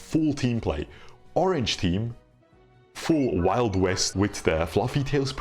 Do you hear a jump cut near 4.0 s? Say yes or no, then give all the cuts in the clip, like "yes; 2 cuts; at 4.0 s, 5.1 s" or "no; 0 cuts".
yes; 1 cut; at 4.0 s